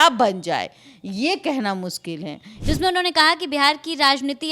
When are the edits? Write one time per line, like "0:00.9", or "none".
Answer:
0:02.5